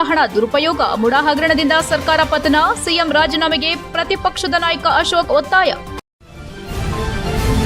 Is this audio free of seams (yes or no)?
no